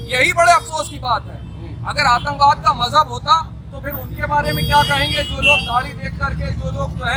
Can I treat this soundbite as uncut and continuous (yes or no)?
yes